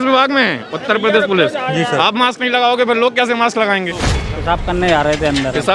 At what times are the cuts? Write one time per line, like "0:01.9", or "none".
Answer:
0:04.2

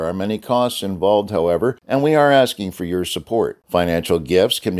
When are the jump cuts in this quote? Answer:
0:01.8

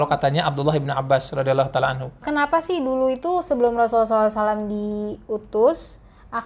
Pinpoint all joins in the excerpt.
0:02.2

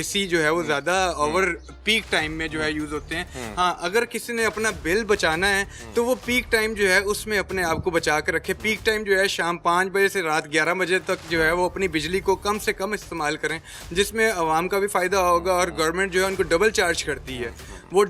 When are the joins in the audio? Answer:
none

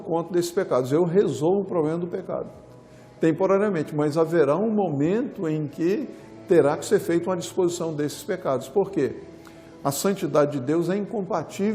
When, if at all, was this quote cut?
none

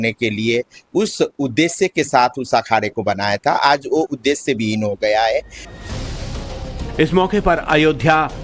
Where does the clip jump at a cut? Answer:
0:02.4

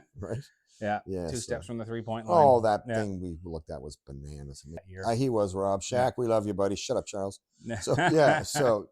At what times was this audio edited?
0:04.9

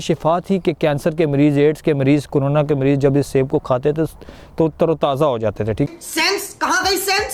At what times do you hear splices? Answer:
none

